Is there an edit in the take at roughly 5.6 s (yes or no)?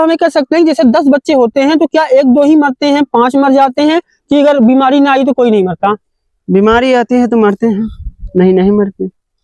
no